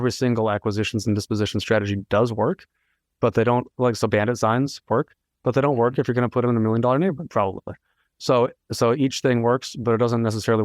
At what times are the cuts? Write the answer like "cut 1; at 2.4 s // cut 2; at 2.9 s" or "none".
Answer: none

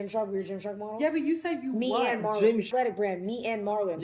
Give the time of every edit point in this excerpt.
cut 1; at 2.7 s

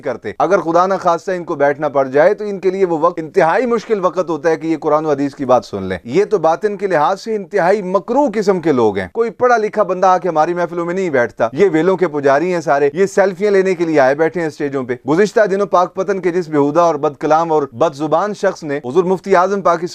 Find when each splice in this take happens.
cut 1; at 9.1 s // cut 2; at 11.5 s // cut 3; at 15.0 s

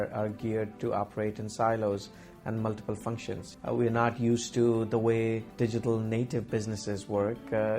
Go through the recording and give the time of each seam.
cut 1; at 3.5 s // cut 2; at 5.5 s

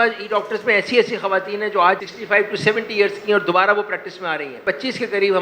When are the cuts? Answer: cut 1; at 2.1 s

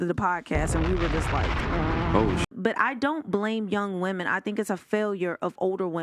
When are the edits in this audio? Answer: cut 1; at 2.5 s

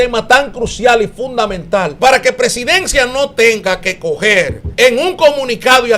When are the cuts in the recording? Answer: cut 1; at 1.9 s // cut 2; at 4.6 s

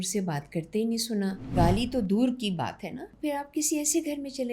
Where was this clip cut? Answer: cut 1; at 1.5 s // cut 2; at 3.1 s

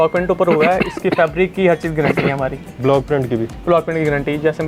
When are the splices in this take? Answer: none

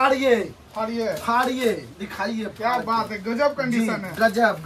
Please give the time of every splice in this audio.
none

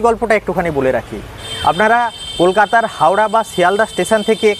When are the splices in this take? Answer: none

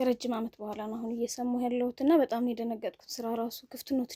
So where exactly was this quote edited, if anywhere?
none

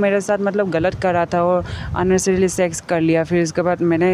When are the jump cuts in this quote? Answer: none

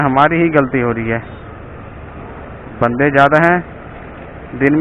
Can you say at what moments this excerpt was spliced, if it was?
none

